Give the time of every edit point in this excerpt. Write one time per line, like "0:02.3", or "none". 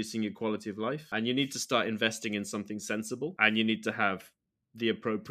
0:01.1
0:03.3